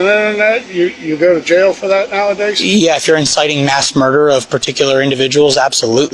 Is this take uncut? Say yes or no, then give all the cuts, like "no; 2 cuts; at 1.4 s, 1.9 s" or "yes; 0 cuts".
yes; 0 cuts